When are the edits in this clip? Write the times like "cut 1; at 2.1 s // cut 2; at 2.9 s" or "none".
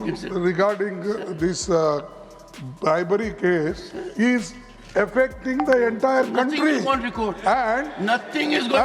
none